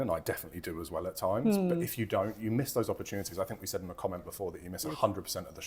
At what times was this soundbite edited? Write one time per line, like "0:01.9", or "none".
none